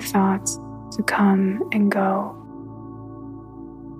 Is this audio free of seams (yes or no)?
no